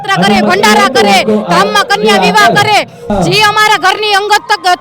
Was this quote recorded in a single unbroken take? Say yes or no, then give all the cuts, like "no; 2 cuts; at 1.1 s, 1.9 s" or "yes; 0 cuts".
no; 1 cut; at 3.1 s